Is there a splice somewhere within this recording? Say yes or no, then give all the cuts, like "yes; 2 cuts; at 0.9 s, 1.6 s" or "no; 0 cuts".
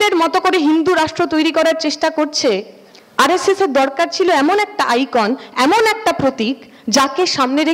no; 0 cuts